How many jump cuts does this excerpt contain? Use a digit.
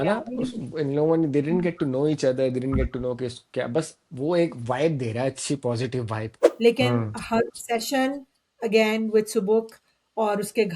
1